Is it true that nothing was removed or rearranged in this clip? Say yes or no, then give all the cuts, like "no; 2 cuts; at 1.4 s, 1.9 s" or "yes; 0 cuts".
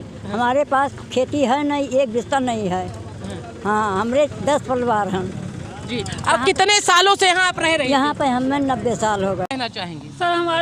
no; 1 cut; at 9.5 s